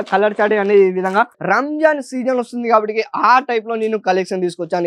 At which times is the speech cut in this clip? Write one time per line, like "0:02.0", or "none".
0:01.4